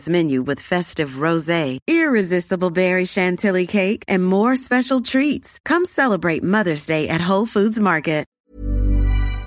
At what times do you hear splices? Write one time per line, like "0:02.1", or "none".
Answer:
0:08.4